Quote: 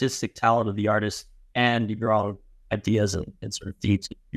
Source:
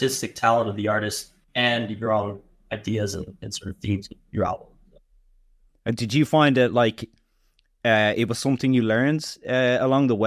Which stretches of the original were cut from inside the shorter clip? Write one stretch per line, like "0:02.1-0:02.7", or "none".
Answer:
none